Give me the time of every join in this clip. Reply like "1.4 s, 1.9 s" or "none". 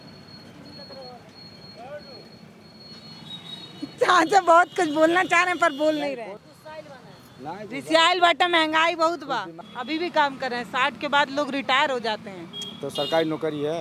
6.4 s, 9.6 s